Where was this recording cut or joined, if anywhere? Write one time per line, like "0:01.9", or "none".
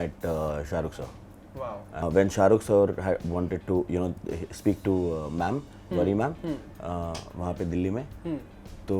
0:02.0